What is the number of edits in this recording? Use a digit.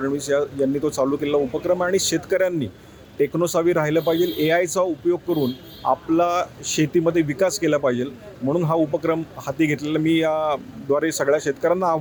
0